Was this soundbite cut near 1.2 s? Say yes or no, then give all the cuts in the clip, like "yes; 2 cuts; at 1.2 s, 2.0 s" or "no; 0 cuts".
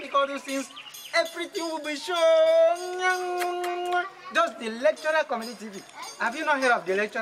no; 0 cuts